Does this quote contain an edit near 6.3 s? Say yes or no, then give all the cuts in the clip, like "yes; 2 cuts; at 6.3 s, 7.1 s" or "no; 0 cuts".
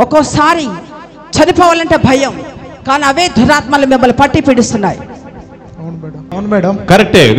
yes; 1 cut; at 6.3 s